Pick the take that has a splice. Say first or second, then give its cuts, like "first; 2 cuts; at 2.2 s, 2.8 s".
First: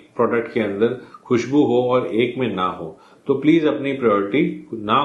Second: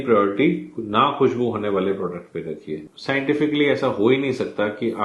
second; 1 cut; at 2.9 s